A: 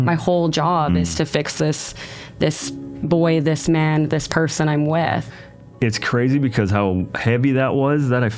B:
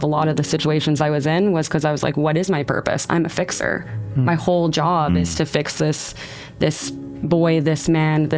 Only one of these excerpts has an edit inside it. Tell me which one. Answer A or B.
A